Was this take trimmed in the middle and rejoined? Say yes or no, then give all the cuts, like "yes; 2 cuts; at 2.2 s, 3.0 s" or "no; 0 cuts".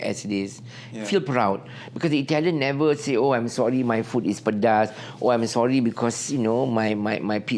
no; 0 cuts